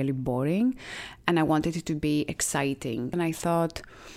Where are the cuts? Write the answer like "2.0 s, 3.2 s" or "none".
3.1 s